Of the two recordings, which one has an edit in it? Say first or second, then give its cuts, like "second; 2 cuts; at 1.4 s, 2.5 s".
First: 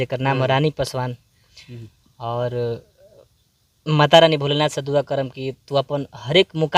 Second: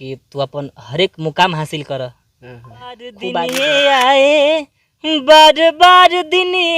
second; 1 cut; at 3.2 s